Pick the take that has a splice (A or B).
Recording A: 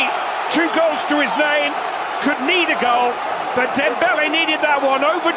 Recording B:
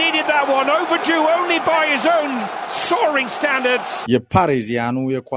B